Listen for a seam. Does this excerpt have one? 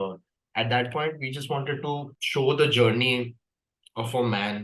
yes; 1 cut; at 2.2 s

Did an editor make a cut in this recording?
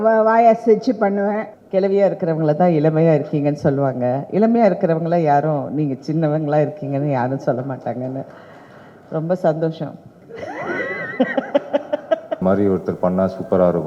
yes; 2 cuts; at 1.5 s, 12.4 s

